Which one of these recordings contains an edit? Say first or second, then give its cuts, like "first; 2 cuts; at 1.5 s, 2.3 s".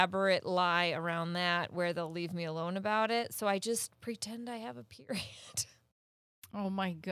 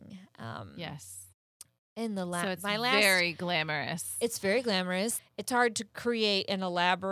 second; 1 cut; at 5.2 s